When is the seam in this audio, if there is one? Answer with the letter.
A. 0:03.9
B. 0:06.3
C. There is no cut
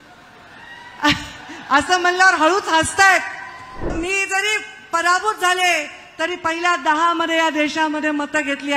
A